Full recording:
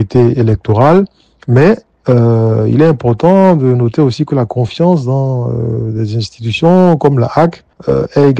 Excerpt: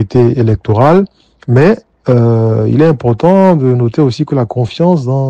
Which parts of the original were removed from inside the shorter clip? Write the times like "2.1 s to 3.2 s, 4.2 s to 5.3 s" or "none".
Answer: none